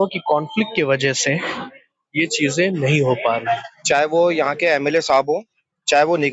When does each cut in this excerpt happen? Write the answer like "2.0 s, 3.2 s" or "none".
3.7 s